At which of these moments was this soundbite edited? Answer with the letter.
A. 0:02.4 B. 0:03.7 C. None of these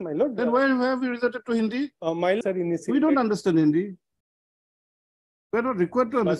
A